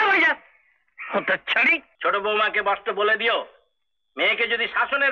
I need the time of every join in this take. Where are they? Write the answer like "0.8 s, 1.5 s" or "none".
1.9 s